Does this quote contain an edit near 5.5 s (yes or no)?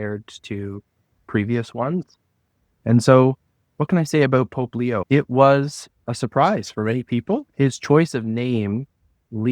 no